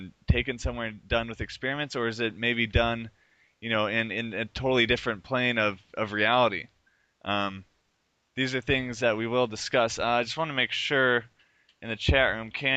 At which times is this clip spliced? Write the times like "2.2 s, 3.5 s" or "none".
2.0 s